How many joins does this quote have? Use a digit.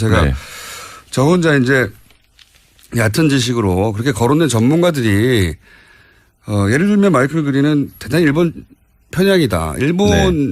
1